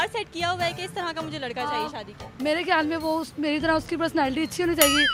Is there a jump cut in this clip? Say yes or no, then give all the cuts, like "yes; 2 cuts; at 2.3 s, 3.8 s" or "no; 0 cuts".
no; 0 cuts